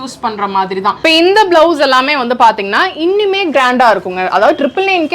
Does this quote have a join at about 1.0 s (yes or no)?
yes